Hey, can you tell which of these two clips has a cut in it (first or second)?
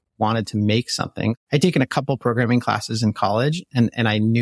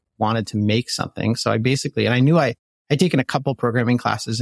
first